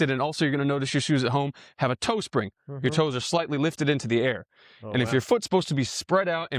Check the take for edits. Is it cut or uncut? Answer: uncut